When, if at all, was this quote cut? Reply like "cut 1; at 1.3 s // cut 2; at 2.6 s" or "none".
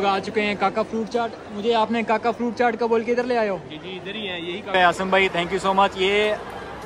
cut 1; at 4.7 s